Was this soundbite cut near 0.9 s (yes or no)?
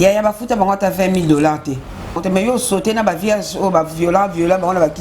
no